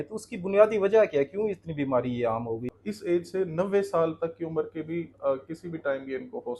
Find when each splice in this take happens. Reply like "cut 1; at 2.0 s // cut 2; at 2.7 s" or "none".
cut 1; at 2.7 s